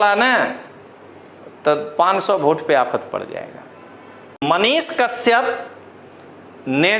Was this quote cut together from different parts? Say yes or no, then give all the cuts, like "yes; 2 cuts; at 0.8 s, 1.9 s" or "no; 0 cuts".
yes; 1 cut; at 4.4 s